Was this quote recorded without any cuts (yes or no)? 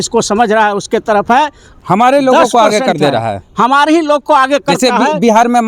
no